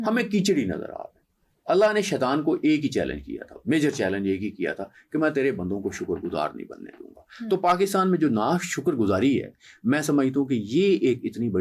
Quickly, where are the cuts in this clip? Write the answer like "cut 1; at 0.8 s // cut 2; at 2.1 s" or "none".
none